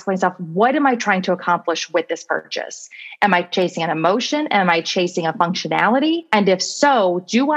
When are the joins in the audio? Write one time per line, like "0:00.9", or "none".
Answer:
0:06.2